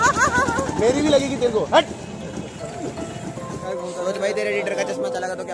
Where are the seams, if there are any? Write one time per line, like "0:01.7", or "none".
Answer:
0:03.6